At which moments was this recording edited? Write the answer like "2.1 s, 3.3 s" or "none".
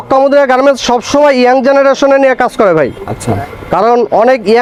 none

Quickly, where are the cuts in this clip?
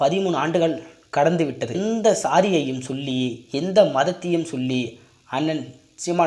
1.8 s

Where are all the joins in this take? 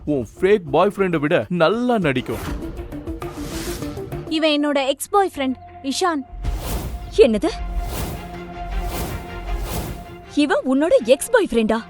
4.2 s

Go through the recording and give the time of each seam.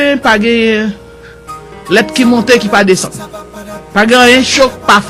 none

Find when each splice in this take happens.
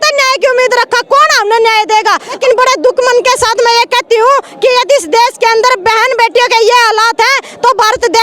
2.4 s

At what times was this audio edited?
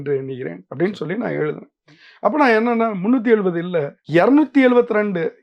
none

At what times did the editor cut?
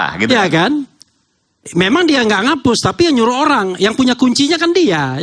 none

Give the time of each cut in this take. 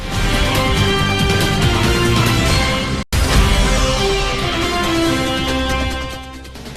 5.7 s

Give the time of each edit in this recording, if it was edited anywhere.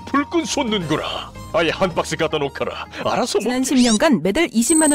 3.5 s

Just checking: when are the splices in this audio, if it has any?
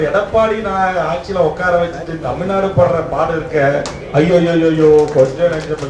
none

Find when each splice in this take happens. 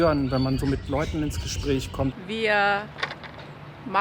2.1 s

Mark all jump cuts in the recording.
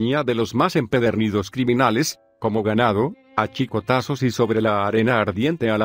none

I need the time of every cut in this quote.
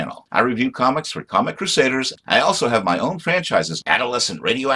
1.6 s

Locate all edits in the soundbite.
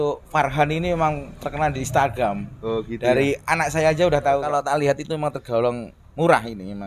4.5 s

